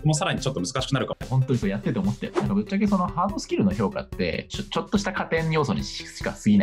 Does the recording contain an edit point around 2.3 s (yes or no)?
yes